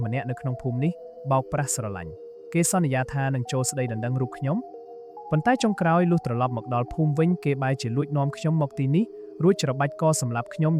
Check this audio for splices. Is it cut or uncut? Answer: uncut